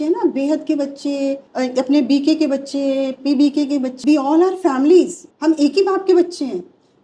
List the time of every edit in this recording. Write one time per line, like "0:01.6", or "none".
0:01.5
0:04.0
0:05.2